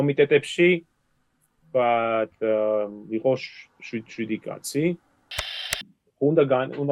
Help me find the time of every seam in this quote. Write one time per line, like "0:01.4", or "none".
0:05.7